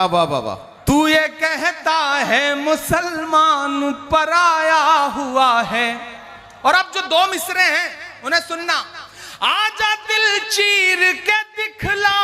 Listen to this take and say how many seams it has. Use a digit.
0